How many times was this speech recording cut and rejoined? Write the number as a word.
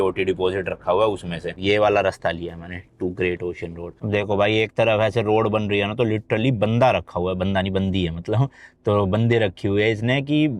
two